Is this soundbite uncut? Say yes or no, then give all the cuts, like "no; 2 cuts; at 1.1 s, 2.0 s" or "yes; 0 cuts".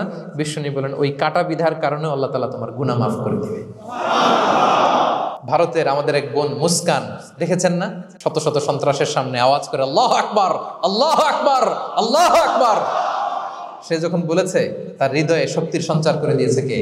no; 1 cut; at 5.3 s